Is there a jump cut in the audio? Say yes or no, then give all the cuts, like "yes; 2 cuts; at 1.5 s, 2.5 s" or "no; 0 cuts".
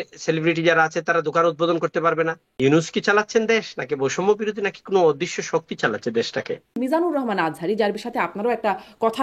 yes; 2 cuts; at 2.4 s, 6.7 s